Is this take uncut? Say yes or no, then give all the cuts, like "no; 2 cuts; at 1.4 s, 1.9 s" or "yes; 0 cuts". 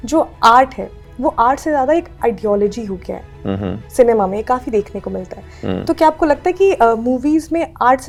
yes; 0 cuts